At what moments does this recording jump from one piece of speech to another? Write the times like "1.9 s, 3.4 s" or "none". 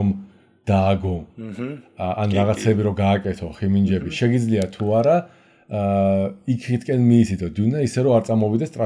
none

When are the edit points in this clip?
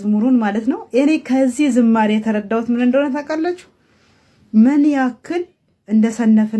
none

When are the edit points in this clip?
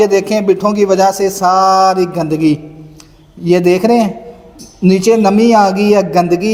none

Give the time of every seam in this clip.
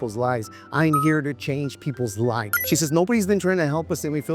2.5 s

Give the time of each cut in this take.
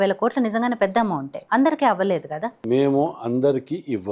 1.4 s, 2.6 s

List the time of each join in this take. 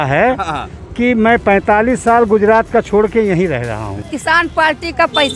3.9 s

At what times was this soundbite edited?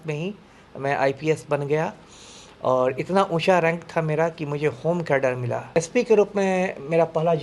5.7 s

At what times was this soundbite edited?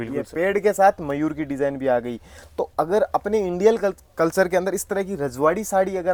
none

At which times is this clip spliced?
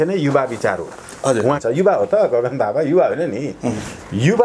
1.6 s

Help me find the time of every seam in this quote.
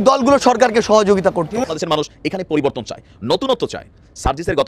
1.7 s

